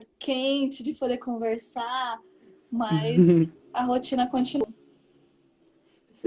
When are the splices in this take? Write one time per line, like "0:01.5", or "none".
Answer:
0:04.6